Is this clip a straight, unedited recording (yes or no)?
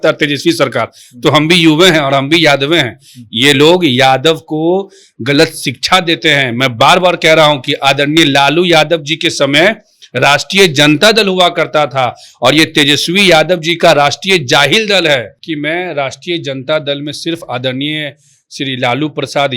no